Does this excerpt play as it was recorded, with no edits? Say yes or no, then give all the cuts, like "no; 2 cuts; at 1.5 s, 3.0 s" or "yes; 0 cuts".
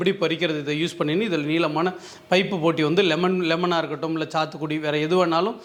yes; 0 cuts